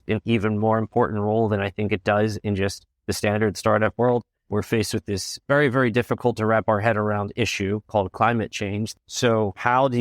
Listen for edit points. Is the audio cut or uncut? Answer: cut